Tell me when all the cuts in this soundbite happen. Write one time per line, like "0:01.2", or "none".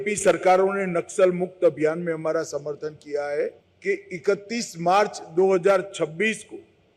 0:03.7